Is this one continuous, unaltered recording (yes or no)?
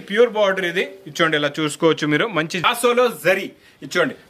no